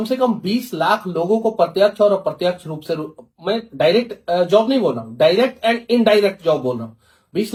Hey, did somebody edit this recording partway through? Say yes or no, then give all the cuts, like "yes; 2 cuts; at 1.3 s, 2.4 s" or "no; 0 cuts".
no; 0 cuts